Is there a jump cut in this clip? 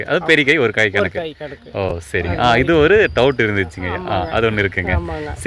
no; 0 cuts

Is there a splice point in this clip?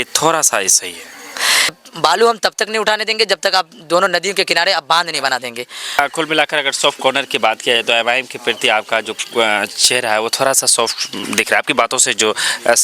yes; 2 cuts; at 1.8 s, 6.0 s

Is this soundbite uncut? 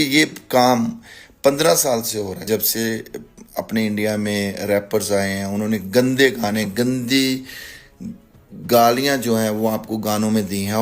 no; 1 cut; at 2.4 s

